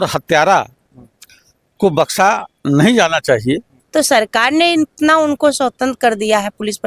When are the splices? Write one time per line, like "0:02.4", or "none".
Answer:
0:03.7